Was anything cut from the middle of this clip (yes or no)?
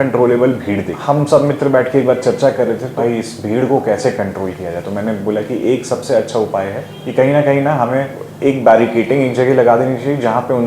yes